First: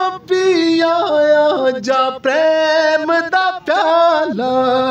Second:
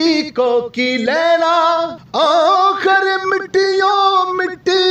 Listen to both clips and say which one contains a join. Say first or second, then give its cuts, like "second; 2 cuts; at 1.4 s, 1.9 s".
second; 1 cut; at 2.0 s